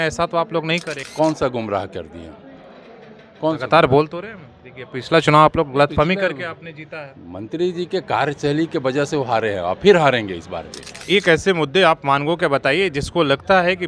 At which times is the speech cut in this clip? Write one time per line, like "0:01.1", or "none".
0:11.0